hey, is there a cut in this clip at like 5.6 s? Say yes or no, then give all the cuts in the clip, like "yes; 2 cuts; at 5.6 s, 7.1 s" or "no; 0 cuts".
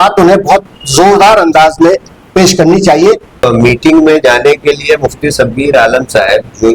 no; 1 cut; at 3.4 s